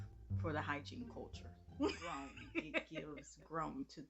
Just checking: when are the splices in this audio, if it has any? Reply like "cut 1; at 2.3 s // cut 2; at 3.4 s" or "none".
cut 1; at 2.9 s

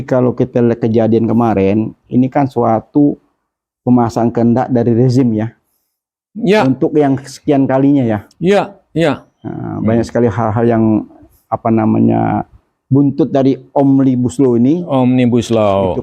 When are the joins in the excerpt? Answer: none

